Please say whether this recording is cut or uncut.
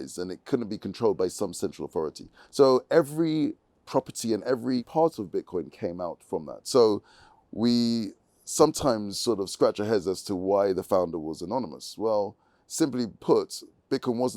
cut